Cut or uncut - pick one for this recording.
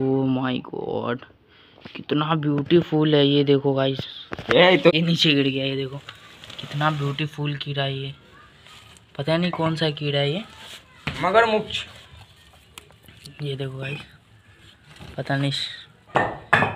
cut